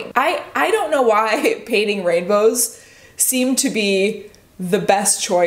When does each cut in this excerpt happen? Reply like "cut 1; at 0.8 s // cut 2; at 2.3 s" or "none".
none